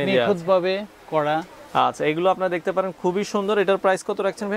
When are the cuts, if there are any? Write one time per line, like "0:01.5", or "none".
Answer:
none